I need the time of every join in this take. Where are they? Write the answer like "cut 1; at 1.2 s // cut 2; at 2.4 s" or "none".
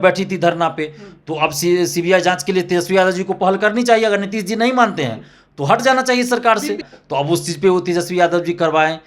cut 1; at 6.8 s